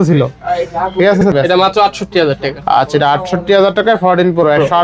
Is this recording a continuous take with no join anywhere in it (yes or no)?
no